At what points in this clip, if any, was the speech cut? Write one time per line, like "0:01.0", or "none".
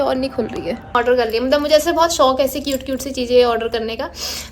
0:00.9